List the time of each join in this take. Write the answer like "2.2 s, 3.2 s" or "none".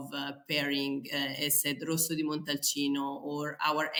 none